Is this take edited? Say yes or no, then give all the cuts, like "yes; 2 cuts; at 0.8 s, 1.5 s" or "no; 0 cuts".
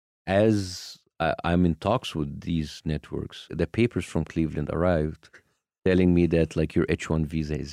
yes; 1 cut; at 3.5 s